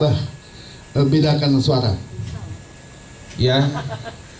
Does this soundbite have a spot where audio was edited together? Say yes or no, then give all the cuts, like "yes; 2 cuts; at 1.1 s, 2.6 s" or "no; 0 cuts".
no; 0 cuts